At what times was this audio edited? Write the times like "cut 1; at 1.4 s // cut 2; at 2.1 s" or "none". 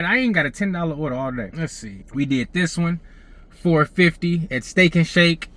none